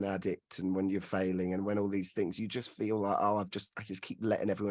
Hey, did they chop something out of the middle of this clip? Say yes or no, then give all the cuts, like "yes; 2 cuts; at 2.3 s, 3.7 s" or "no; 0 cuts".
no; 0 cuts